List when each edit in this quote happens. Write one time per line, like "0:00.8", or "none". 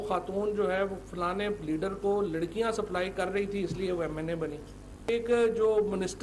0:05.1